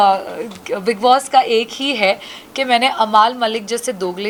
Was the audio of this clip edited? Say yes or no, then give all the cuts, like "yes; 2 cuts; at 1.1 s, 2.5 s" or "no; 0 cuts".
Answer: no; 0 cuts